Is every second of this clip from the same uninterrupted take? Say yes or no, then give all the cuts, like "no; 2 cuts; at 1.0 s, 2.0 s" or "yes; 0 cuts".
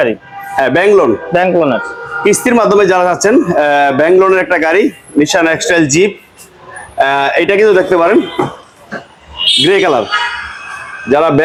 yes; 0 cuts